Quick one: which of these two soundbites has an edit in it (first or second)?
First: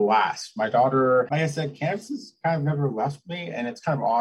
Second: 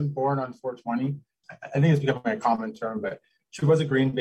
second